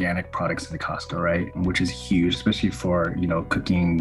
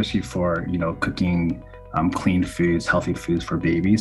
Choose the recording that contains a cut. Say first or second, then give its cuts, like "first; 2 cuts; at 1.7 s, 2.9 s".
first; 1 cut; at 1.6 s